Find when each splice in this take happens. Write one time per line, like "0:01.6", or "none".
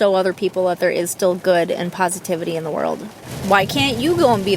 0:03.3